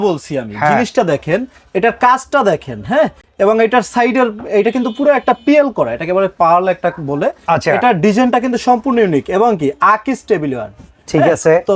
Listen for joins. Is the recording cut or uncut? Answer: uncut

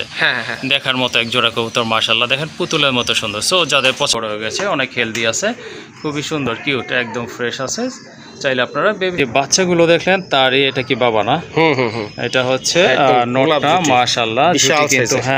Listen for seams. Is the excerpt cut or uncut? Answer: cut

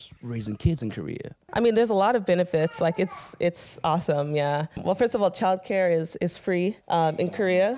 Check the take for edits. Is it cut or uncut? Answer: uncut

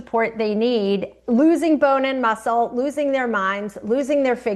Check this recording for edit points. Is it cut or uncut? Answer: uncut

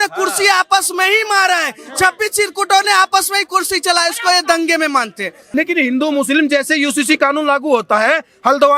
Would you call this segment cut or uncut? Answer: cut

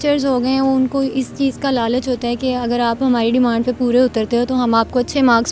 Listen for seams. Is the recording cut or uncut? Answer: uncut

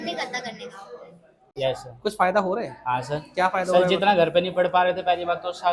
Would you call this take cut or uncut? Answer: cut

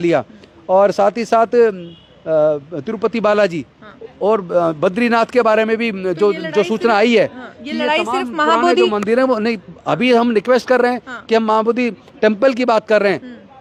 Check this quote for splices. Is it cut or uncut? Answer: uncut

